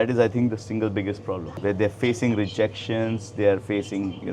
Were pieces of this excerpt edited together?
no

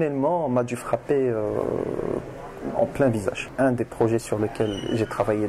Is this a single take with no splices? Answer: no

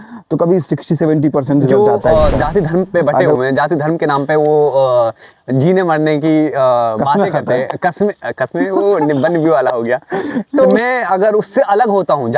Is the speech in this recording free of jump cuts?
no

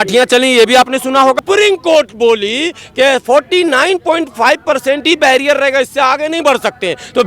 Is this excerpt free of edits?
no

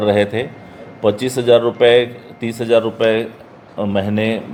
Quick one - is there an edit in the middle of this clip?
no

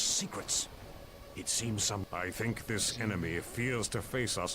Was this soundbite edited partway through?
yes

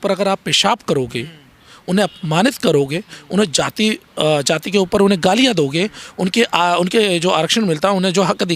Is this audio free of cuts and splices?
yes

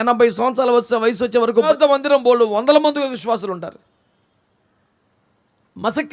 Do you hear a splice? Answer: yes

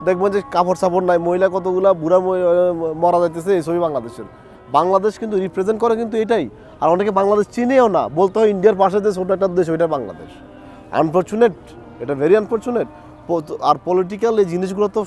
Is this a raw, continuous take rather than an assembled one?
yes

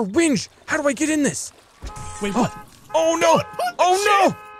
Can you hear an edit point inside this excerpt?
no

